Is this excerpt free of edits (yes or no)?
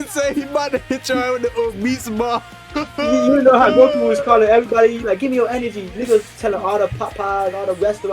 yes